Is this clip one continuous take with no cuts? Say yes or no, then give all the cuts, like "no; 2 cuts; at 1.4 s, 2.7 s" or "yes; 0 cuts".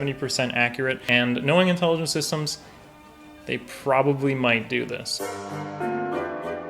no; 2 cuts; at 1.0 s, 5.0 s